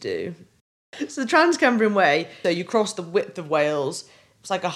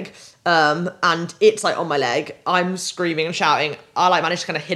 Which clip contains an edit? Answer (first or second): first